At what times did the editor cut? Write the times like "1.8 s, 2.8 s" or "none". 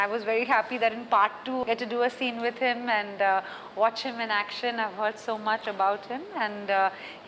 none